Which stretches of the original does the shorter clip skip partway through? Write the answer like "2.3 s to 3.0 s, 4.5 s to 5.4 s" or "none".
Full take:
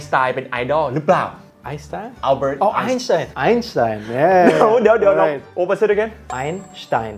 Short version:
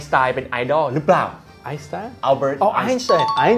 none